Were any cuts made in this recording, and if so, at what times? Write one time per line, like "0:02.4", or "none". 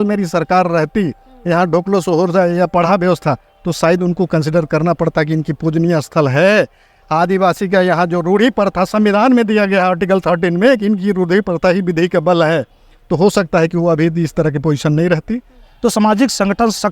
0:15.7